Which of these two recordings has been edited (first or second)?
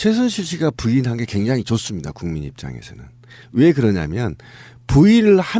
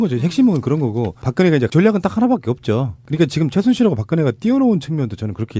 first